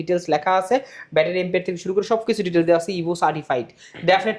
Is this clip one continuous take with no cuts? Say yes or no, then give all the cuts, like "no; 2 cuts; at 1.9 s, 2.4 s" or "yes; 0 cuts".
yes; 0 cuts